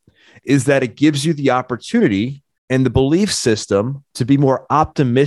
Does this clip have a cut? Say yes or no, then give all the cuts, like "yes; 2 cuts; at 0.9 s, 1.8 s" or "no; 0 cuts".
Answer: no; 0 cuts